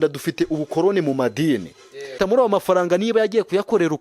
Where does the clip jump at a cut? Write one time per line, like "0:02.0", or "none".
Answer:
0:02.2